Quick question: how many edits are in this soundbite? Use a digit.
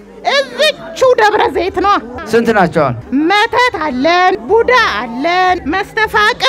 4